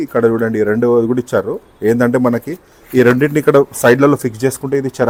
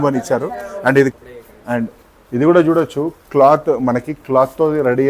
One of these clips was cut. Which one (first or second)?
second